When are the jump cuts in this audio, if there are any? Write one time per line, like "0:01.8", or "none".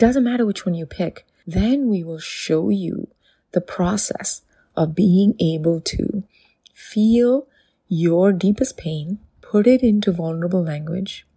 none